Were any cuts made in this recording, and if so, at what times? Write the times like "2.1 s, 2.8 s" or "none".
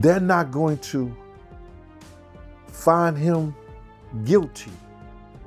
1.1 s, 2.8 s, 4.6 s